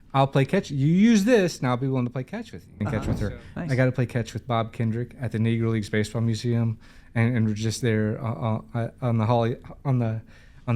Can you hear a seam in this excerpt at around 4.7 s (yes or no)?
no